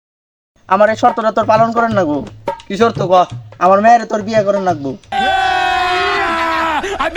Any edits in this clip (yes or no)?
no